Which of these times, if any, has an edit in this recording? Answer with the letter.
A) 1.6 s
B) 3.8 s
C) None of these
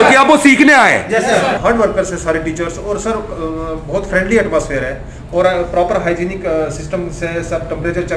A